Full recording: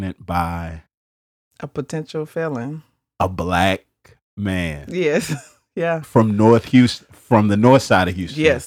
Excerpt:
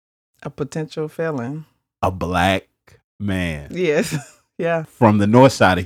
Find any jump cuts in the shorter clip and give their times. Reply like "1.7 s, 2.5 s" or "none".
4.8 s